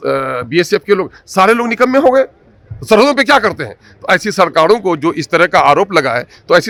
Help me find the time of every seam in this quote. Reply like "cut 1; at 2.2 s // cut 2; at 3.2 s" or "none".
none